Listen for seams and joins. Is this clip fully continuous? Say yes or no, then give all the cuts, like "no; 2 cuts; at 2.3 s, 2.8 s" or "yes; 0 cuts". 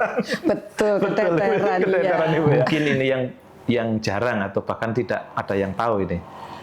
no; 1 cut; at 2.7 s